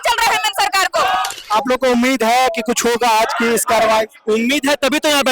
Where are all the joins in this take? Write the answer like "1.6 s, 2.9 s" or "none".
1.3 s

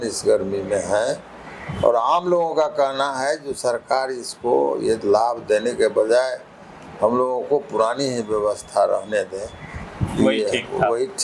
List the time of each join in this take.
none

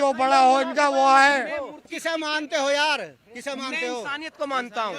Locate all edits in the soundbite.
1.9 s

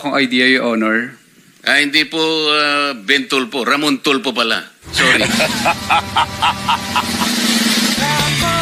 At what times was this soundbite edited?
none

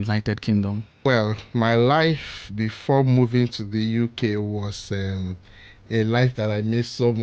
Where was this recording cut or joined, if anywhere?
1.1 s

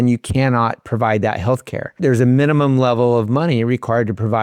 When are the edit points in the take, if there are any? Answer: 2.0 s

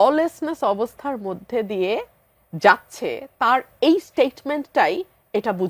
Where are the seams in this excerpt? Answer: none

